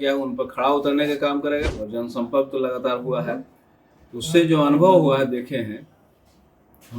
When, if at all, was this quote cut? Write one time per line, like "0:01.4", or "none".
0:01.7